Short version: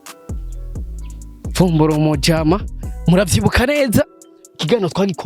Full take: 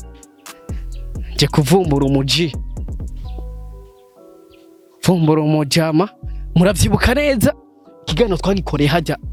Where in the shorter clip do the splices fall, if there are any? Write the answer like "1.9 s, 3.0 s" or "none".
0.9 s

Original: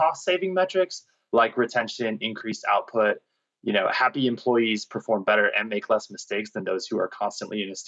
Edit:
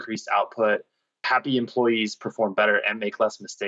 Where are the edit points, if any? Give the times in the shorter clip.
1.2 s

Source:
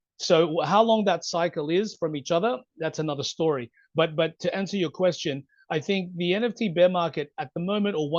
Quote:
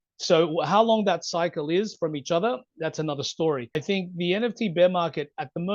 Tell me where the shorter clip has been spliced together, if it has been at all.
3.7 s

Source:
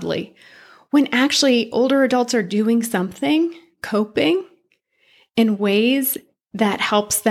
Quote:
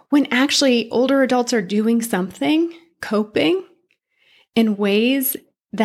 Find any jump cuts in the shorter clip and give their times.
none

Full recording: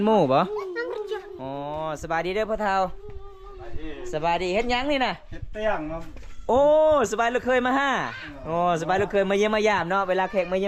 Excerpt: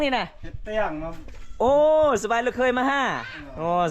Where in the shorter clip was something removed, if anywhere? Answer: none

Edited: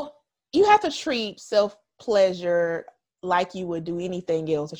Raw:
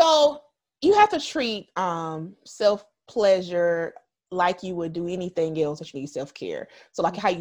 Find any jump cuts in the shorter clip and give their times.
1.3 s

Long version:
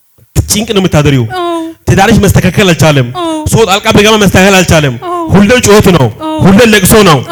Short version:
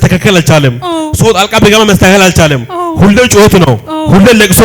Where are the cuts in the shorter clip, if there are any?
none

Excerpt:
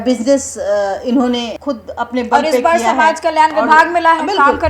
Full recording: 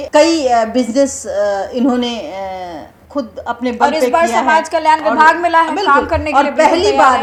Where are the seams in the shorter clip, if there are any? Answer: 1.5 s

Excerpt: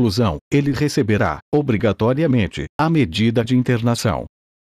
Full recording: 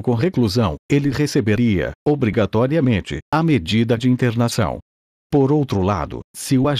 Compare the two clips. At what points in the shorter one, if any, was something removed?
1.2 s

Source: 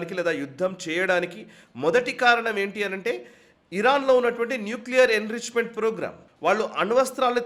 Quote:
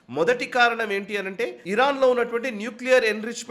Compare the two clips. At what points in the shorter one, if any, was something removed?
1.6 s

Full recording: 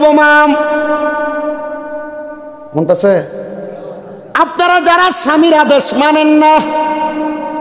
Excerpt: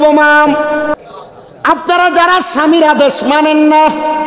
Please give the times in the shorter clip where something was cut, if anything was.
1.0 s

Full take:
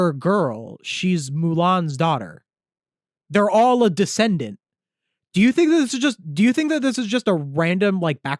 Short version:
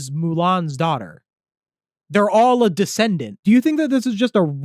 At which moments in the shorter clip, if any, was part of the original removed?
3.3 s

